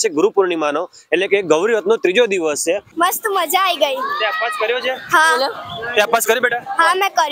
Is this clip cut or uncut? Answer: cut